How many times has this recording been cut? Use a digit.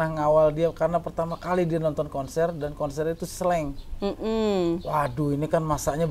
0